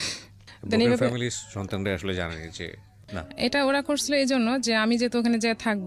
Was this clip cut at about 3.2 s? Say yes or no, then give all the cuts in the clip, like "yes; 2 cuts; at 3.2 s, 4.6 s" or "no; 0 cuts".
yes; 1 cut; at 3.2 s